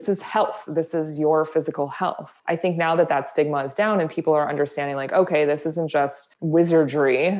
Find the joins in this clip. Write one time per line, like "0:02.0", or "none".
0:02.3
0:06.3